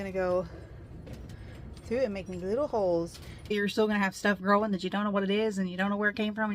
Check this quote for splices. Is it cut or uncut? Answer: cut